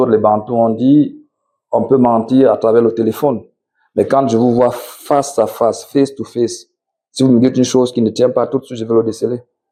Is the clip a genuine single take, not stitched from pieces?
yes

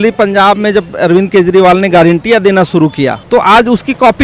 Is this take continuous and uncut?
no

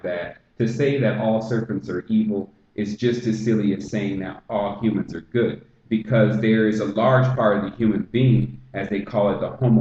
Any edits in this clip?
yes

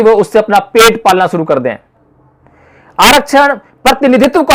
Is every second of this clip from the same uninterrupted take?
yes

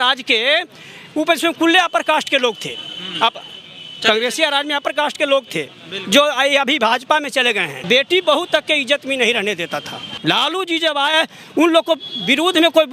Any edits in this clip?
yes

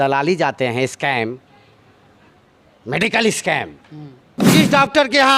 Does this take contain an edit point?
yes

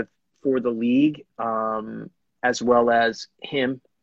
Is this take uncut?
yes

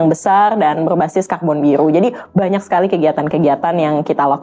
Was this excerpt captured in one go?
yes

